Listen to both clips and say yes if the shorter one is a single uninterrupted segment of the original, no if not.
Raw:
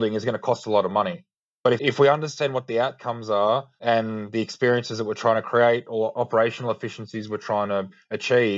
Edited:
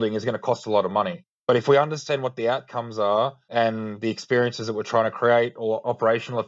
no